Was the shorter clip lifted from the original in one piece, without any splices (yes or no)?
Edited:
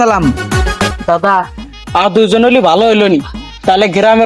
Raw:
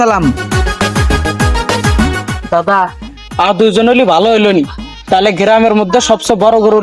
no